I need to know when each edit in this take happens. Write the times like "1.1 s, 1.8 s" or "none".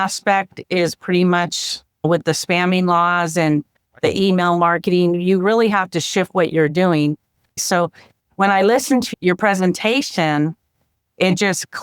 7.6 s